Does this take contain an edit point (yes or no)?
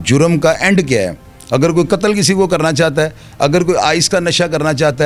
no